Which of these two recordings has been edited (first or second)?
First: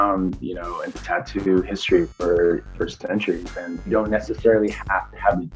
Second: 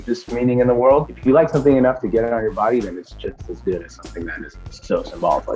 first